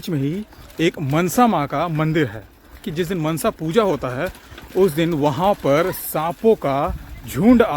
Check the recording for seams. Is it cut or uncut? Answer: cut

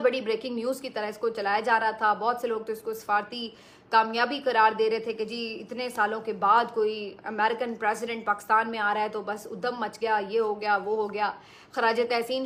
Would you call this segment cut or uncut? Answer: uncut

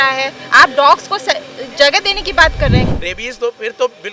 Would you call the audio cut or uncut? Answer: cut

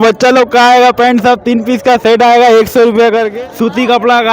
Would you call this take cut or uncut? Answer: cut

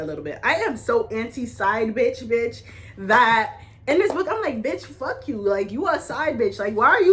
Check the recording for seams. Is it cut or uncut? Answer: uncut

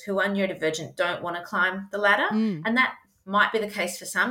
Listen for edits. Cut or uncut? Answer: uncut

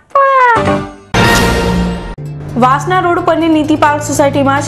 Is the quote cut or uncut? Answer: cut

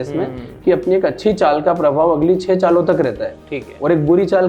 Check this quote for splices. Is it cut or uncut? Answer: uncut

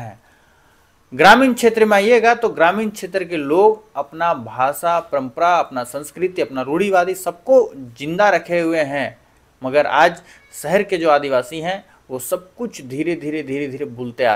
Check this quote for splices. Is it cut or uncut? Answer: uncut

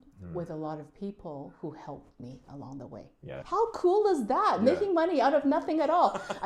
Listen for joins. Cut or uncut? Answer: cut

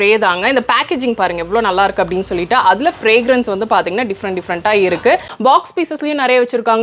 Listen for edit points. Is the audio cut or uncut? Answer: cut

